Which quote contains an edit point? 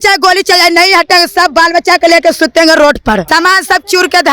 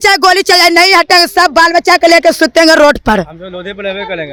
first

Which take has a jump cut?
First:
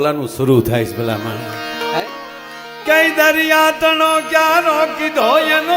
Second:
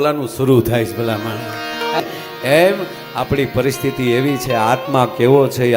second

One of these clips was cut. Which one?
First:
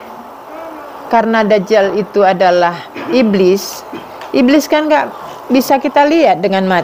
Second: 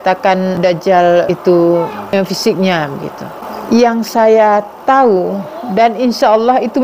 second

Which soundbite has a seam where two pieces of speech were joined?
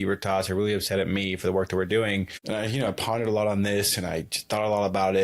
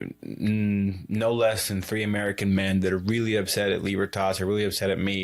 first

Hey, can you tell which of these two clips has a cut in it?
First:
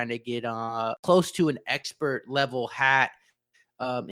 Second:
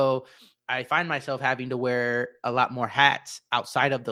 first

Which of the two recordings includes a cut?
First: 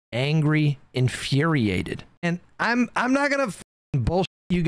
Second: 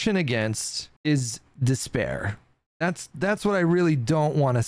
first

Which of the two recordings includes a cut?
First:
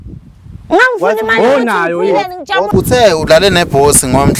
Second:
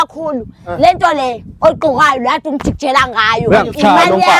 first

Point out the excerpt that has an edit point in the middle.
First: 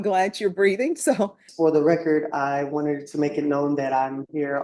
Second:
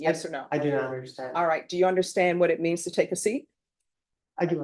first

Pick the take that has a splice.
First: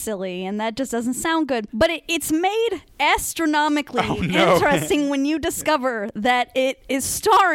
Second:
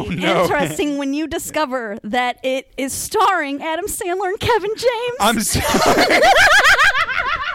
first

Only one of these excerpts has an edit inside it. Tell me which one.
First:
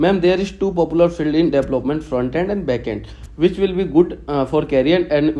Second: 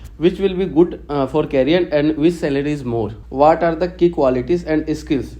second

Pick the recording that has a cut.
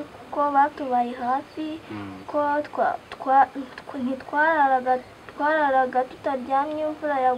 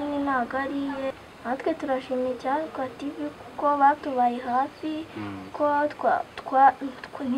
second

